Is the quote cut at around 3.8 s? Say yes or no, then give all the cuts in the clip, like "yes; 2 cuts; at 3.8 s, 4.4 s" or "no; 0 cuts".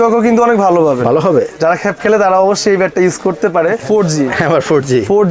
yes; 1 cut; at 3.8 s